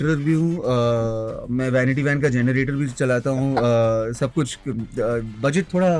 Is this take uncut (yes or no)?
yes